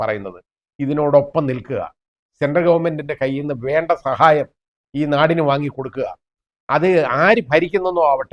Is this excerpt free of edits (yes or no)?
yes